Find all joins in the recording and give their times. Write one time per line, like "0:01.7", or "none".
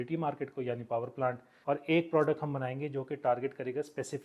0:01.5